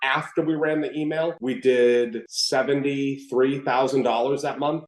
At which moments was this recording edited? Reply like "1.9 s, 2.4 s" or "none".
none